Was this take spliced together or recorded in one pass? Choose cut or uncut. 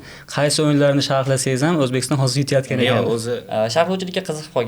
cut